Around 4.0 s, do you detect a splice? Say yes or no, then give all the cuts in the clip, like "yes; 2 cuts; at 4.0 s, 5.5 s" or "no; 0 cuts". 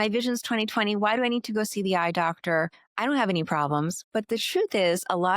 yes; 2 cuts; at 2.8 s, 4.0 s